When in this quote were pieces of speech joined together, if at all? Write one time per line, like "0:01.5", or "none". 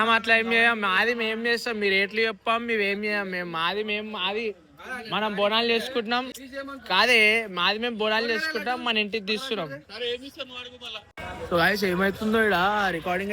none